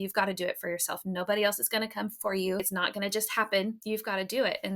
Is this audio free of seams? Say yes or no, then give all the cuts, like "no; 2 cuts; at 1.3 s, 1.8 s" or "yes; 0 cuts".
no; 2 cuts; at 2.7 s, 3.8 s